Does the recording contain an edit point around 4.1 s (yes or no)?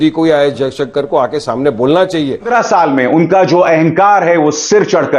no